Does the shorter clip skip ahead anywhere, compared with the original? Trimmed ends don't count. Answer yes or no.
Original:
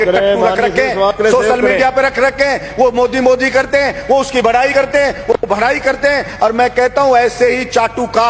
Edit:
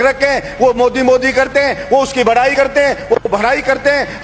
no